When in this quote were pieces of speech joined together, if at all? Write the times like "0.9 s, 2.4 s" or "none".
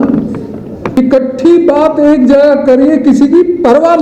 1.0 s